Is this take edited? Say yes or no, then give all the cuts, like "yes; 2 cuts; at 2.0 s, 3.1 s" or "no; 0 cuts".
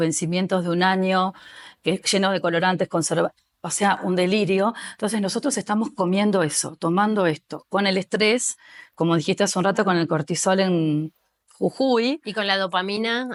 no; 0 cuts